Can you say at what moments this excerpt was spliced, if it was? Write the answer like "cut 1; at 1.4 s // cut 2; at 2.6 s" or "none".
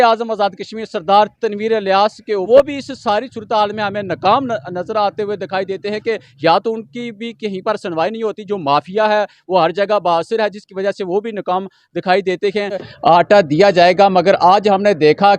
cut 1; at 2.5 s // cut 2; at 12.9 s